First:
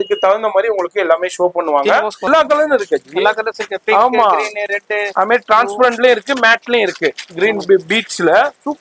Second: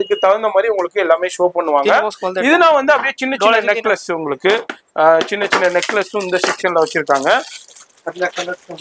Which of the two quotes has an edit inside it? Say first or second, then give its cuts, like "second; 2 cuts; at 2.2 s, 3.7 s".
first; 1 cut; at 2.3 s